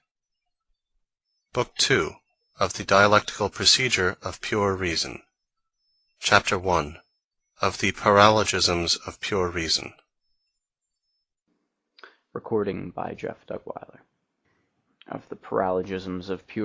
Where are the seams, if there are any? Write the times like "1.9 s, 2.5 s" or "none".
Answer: none